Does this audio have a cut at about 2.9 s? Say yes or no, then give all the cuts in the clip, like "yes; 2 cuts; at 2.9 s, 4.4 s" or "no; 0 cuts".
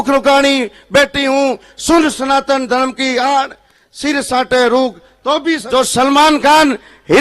no; 1 cut; at 5.6 s